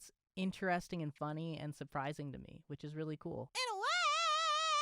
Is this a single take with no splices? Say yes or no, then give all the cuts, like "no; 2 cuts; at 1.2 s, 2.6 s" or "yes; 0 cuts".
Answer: no; 1 cut; at 3.5 s